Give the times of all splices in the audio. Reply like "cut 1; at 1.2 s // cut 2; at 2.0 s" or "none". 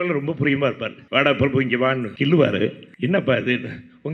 cut 1; at 0.9 s // cut 2; at 2.1 s // cut 3; at 2.9 s